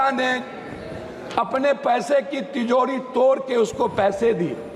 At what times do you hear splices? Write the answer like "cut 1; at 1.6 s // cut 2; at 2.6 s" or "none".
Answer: none